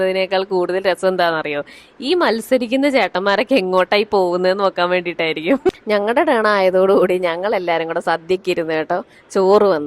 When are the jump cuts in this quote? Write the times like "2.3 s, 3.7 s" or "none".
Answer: 5.8 s